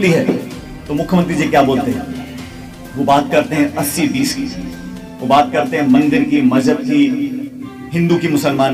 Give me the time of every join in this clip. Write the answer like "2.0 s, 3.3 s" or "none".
none